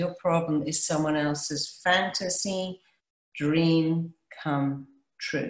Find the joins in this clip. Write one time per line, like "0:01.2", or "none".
none